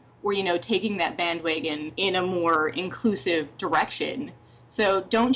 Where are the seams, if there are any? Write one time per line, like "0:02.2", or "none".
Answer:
0:01.9